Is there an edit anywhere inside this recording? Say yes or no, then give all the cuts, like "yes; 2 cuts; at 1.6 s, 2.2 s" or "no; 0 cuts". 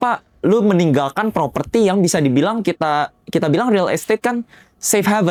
no; 0 cuts